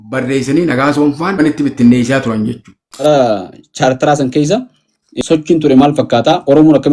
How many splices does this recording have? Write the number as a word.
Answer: three